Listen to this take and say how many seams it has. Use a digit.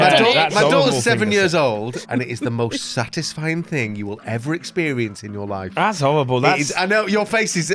1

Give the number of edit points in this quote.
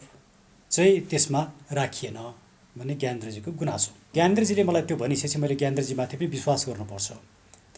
1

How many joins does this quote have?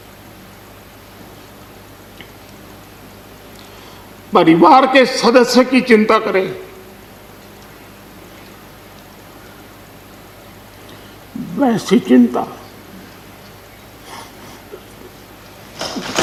0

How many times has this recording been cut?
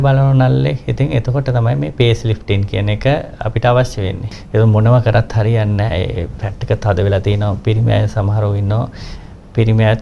1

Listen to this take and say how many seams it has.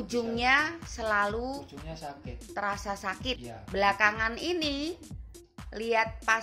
1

